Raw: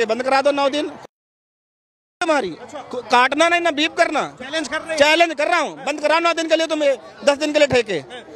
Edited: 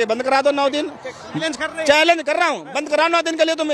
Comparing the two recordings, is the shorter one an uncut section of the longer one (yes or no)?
no